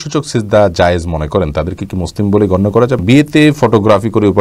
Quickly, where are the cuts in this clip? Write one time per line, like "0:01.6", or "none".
0:03.0